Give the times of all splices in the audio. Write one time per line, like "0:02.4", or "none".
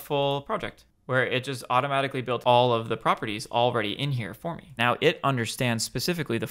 0:02.4
0:04.7